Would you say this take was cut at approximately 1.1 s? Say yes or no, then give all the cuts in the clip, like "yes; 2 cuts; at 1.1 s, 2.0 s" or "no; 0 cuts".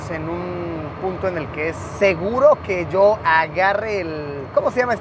no; 0 cuts